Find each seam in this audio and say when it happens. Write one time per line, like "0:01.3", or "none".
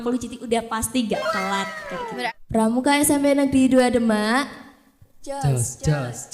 0:02.3